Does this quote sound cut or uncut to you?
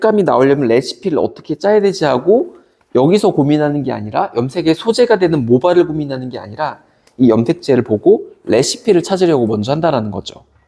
uncut